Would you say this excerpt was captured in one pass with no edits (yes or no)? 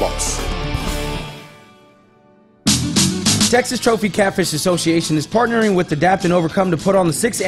no